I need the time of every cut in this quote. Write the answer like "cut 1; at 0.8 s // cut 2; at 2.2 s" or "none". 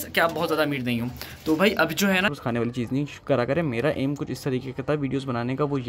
cut 1; at 2.3 s